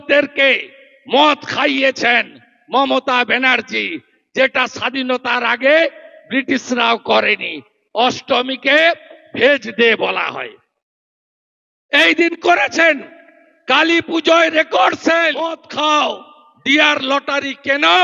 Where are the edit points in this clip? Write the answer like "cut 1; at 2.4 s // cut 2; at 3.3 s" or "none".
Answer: cut 1; at 15.6 s